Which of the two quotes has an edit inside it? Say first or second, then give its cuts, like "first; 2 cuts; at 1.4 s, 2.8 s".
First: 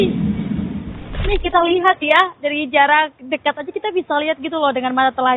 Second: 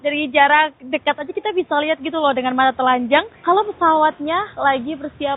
first; 1 cut; at 1.2 s